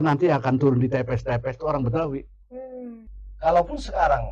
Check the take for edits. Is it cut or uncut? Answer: cut